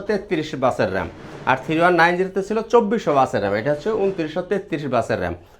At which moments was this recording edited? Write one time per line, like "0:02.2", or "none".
none